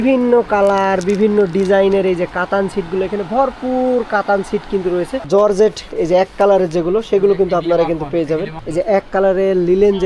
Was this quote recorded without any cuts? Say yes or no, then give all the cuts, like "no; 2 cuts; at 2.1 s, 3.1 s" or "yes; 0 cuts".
no; 2 cuts; at 5.3 s, 8.6 s